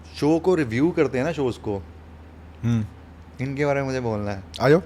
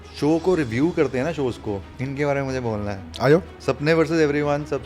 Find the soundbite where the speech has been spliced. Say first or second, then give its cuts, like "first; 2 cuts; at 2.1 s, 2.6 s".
second; 2 cuts; at 1.9 s, 3.5 s